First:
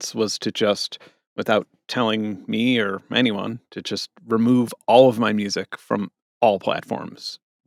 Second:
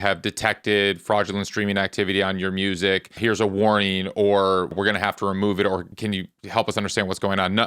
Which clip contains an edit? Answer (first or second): second